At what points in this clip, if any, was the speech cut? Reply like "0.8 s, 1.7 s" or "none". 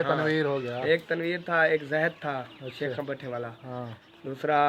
none